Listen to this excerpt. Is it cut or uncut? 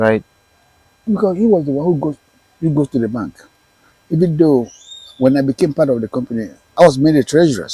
cut